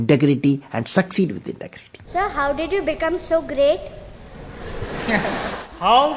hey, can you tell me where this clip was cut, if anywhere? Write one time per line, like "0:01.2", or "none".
0:02.1